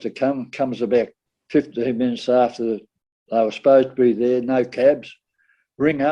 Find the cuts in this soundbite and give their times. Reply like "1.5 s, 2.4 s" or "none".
none